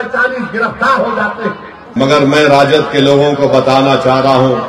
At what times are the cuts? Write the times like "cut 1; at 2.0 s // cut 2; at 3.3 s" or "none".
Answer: cut 1; at 1.8 s